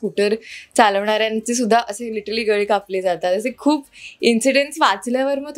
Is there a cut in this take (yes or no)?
no